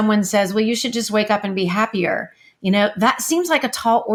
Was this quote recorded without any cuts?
yes; 0 cuts

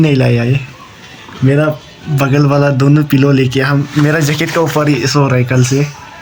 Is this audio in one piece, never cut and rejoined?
yes; 0 cuts

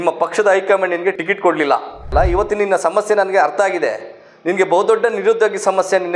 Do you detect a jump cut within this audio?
yes; 2 cuts; at 1.2 s, 2.1 s

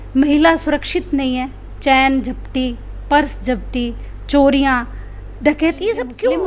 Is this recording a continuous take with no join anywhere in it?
yes; 0 cuts

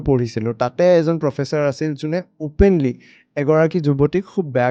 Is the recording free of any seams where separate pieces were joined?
yes; 0 cuts

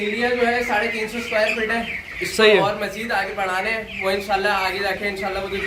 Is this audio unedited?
yes; 0 cuts

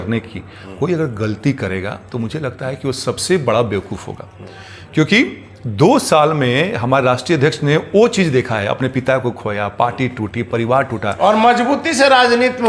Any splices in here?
no; 0 cuts

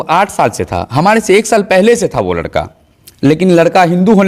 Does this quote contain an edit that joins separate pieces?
no; 0 cuts

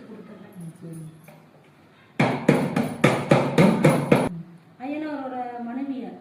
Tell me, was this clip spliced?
yes; 1 cut; at 4.3 s

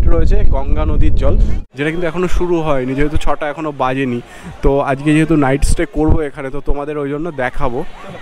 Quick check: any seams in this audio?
yes; 1 cut; at 1.5 s

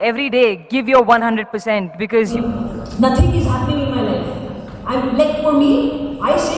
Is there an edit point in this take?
yes; 1 cut; at 2.3 s

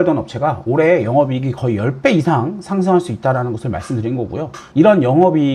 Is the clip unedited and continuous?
no; 1 cut; at 4.6 s

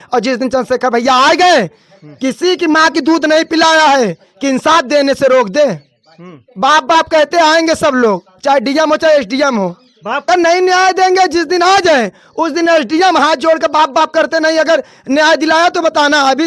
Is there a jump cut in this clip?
yes; 1 cut; at 10.3 s

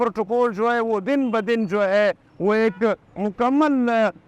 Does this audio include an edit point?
no; 0 cuts

